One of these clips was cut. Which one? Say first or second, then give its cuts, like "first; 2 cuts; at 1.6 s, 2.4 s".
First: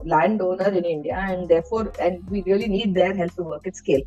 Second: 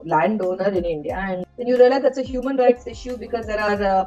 second; 1 cut; at 1.4 s